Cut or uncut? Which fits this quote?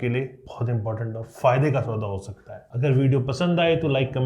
uncut